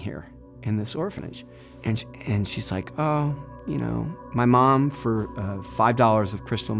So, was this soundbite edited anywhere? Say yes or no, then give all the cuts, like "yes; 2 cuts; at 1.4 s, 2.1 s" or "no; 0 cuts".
yes; 1 cut; at 1.7 s